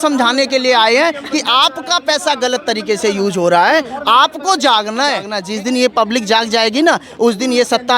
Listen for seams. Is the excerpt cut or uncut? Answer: cut